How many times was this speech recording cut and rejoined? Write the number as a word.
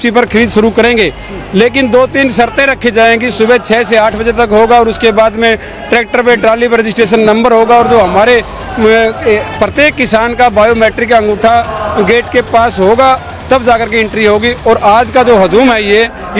zero